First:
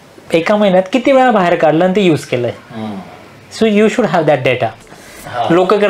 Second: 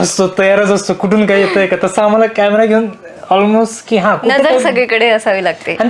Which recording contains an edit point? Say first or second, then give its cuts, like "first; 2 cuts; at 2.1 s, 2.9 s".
first; 1 cut; at 4.8 s